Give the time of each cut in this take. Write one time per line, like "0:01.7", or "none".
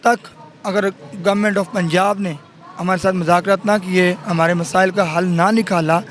none